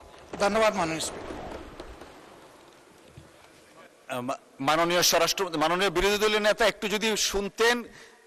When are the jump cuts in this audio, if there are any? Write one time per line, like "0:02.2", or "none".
none